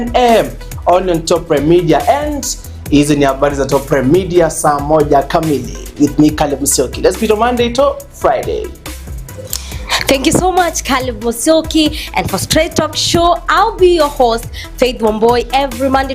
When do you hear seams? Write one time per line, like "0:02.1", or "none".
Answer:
0:10.0